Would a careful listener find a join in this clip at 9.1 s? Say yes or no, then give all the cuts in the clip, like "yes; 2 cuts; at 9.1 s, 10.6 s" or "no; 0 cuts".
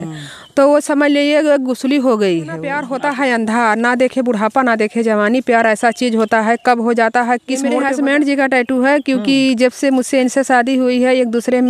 no; 2 cuts; at 2.8 s, 7.2 s